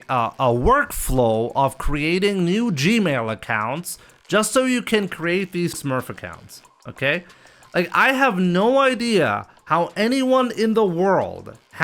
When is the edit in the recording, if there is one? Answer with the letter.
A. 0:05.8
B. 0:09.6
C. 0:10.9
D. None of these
A